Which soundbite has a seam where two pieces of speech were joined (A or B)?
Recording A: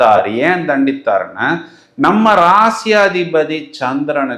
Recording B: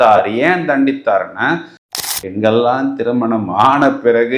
B